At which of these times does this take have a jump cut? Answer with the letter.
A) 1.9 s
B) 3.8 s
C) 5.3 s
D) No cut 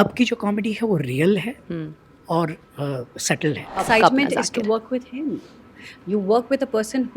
B